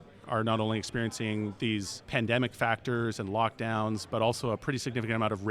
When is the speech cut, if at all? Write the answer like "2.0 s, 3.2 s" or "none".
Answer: 1.8 s, 4.0 s